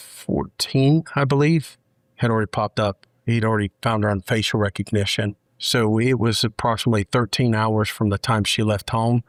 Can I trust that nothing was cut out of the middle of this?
yes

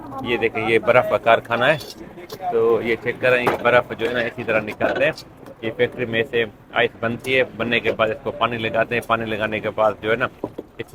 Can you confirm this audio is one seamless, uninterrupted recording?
yes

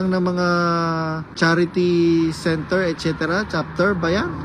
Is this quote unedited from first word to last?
no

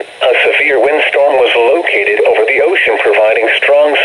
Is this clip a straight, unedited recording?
no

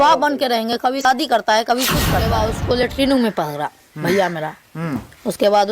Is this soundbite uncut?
no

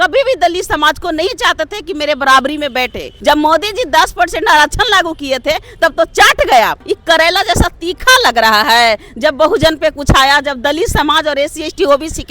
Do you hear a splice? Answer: yes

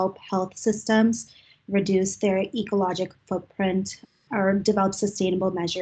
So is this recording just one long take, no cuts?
no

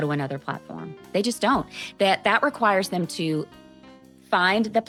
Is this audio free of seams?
yes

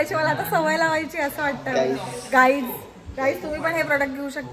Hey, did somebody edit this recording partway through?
no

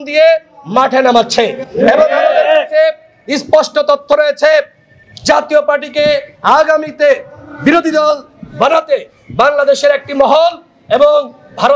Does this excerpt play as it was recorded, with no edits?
yes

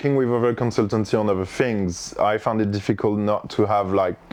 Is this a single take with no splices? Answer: yes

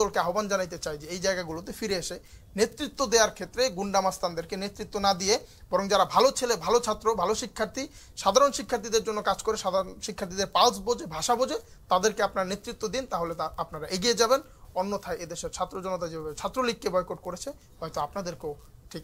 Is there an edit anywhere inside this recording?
no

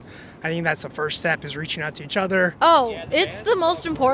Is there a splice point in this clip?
yes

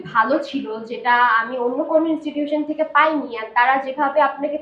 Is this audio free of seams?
yes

